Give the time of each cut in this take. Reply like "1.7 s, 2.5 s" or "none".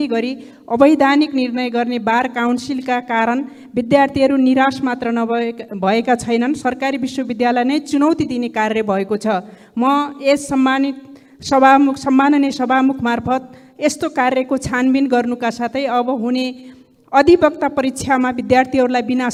none